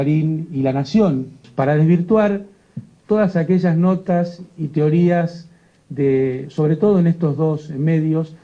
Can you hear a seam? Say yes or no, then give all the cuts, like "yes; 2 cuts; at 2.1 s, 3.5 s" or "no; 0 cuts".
yes; 1 cut; at 1.4 s